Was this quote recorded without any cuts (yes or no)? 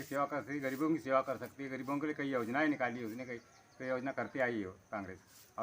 yes